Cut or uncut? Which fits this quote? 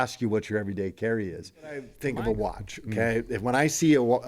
cut